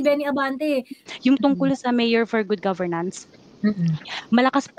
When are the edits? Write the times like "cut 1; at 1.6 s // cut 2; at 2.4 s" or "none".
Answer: cut 1; at 1.0 s